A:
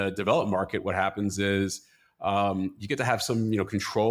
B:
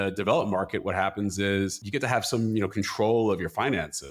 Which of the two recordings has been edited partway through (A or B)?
B